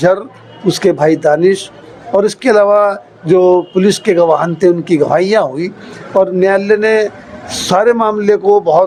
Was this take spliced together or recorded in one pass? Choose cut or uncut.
uncut